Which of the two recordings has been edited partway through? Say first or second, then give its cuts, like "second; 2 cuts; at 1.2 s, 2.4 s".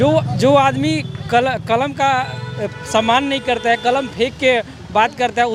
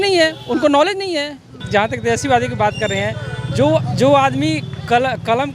second; 1 cut; at 1.5 s